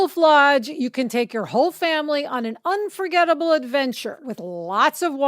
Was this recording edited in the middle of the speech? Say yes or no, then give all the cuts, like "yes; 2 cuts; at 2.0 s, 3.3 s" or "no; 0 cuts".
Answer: yes; 1 cut; at 4.2 s